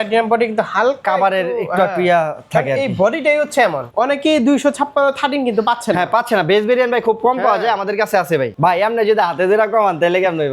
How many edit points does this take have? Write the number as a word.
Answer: two